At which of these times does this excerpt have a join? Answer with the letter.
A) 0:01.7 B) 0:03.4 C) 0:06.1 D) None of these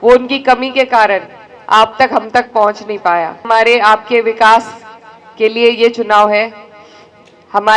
B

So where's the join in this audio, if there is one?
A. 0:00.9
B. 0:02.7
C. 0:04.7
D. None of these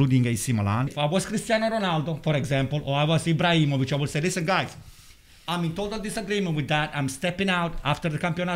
A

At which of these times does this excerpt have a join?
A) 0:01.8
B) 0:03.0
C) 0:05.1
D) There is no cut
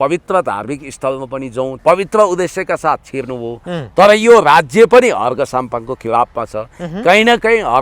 A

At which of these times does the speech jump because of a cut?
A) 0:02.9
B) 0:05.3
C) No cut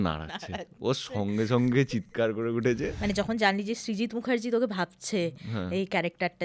A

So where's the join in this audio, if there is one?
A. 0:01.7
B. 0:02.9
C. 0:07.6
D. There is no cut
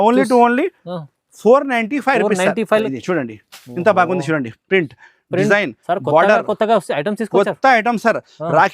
B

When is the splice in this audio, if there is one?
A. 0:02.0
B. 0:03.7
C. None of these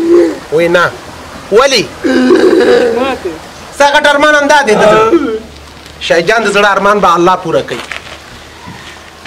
B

